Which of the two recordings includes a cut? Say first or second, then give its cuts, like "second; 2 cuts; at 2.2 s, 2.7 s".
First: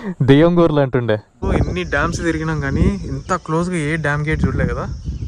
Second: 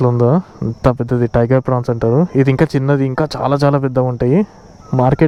first; 1 cut; at 1.4 s